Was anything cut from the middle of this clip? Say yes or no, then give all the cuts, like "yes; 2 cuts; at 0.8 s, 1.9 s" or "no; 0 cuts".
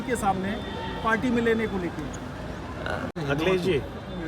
yes; 1 cut; at 3.1 s